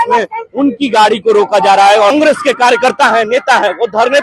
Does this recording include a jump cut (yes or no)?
yes